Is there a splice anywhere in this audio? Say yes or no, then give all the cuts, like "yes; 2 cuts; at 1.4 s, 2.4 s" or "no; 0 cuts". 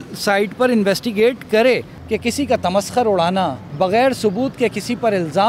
yes; 2 cuts; at 1.9 s, 3.6 s